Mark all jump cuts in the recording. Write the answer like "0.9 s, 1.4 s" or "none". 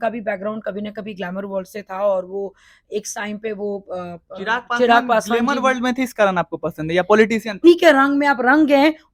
7.6 s